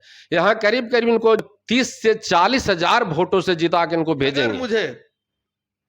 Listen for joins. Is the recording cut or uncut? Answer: cut